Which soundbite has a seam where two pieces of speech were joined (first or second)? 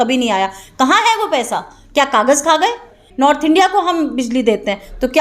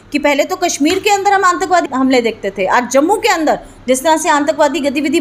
first